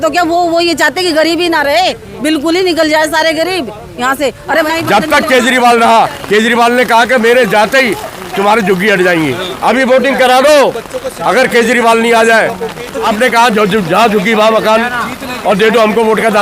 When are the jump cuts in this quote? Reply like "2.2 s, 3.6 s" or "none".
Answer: 4.5 s, 9.5 s, 13.1 s